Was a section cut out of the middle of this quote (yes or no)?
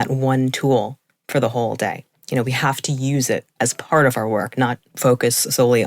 yes